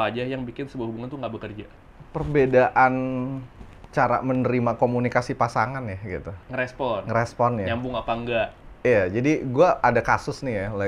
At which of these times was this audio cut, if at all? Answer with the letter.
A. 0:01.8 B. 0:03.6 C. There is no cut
C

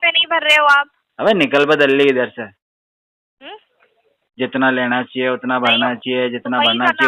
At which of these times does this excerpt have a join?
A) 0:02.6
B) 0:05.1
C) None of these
C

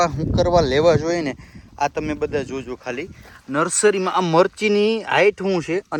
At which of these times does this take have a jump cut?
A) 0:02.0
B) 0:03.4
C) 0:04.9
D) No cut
D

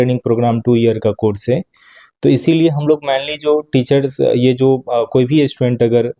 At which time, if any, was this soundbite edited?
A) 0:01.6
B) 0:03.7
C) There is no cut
C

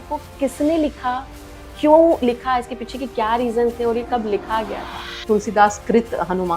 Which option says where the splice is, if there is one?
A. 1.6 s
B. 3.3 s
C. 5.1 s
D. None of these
C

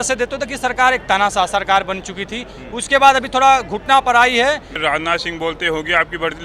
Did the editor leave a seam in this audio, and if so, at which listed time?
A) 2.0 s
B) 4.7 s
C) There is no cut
B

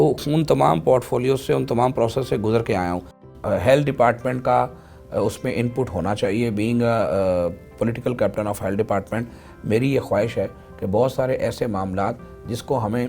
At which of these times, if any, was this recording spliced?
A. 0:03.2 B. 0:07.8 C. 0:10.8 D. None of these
A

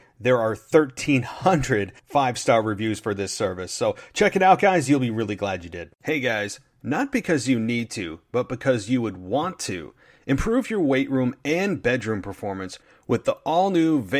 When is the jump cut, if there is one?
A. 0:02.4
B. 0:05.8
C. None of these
B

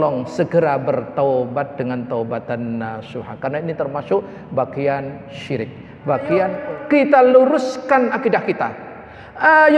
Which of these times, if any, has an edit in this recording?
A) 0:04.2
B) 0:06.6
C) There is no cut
B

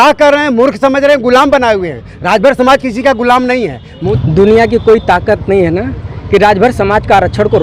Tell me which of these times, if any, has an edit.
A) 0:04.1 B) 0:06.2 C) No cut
A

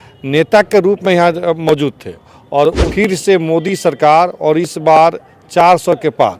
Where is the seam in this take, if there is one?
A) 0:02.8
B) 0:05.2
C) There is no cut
A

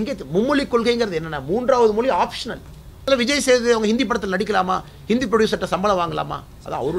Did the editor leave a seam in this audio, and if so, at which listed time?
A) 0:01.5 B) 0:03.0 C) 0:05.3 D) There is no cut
B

